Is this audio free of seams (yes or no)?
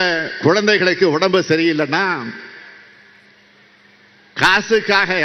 yes